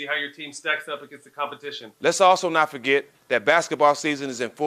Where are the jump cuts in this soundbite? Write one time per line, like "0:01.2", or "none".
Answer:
0:01.9